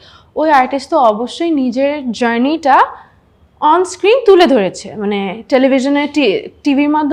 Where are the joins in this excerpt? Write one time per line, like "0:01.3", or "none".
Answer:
none